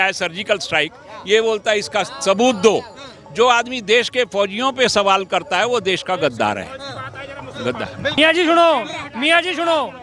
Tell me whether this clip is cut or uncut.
cut